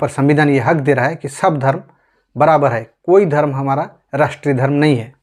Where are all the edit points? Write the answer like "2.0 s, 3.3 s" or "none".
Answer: none

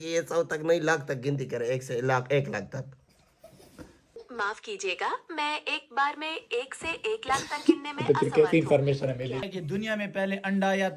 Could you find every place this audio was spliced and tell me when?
4.1 s, 9.5 s

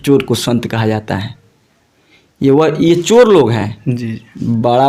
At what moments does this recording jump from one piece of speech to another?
none

